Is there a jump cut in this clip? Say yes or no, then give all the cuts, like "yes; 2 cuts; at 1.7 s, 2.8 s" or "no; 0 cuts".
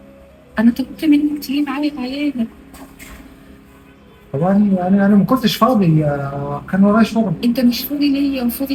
no; 0 cuts